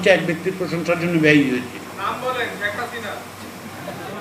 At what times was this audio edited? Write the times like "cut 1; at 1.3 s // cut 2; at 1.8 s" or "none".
cut 1; at 1.9 s

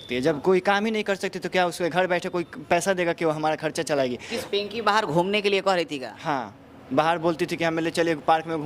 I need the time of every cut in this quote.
cut 1; at 4.3 s

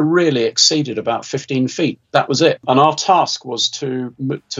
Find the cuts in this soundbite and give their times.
cut 1; at 2.6 s

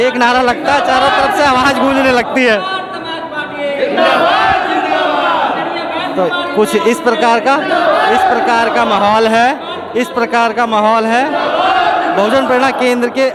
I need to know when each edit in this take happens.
none

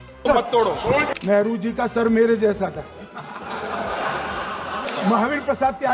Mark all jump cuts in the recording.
cut 1; at 1.1 s // cut 2; at 4.8 s

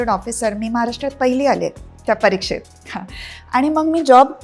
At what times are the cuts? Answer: none

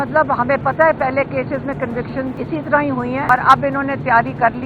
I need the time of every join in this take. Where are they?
cut 1; at 2.4 s // cut 2; at 3.3 s

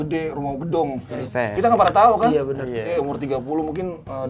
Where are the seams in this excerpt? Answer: cut 1; at 1.2 s // cut 2; at 2.9 s

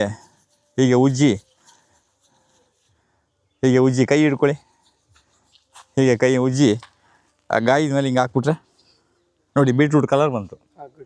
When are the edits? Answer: none

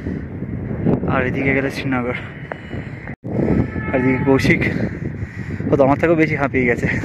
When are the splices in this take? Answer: none

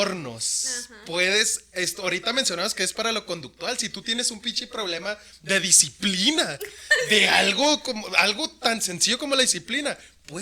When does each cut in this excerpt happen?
none

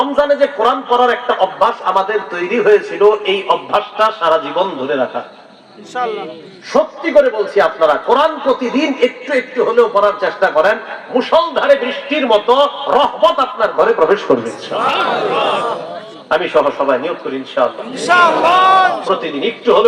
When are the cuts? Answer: none

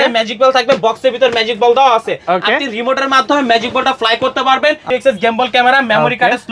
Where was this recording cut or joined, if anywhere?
cut 1; at 4.8 s

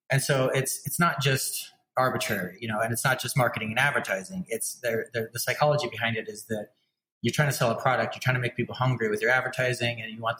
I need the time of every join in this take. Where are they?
none

